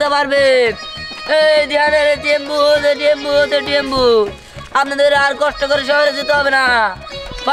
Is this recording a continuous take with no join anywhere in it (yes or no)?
yes